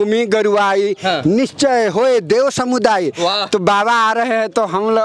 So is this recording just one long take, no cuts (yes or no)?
yes